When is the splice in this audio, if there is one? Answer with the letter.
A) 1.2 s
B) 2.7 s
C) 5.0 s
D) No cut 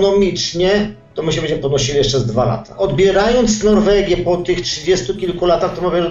B